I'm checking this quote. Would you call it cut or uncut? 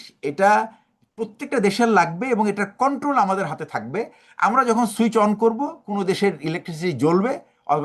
uncut